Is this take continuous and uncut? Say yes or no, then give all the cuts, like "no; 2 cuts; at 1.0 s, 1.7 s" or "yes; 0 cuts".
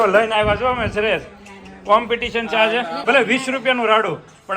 no; 1 cut; at 3.0 s